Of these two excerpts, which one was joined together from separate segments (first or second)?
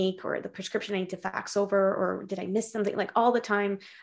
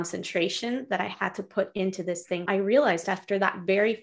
second